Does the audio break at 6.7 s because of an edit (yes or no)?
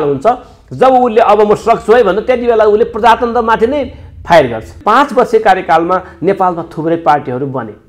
no